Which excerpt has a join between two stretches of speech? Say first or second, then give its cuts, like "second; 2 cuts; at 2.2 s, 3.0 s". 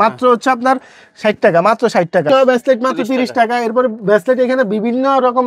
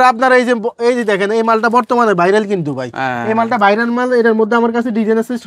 first; 1 cut; at 2.3 s